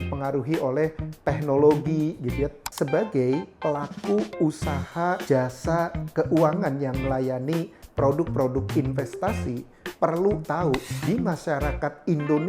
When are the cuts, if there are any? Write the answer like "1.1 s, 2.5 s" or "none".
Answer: 2.6 s, 5.2 s, 10.9 s